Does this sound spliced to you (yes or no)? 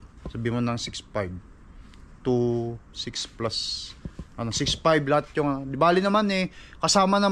no